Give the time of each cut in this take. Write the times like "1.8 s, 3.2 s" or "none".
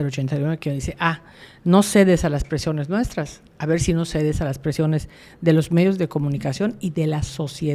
none